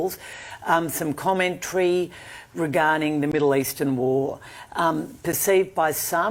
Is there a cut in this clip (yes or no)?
no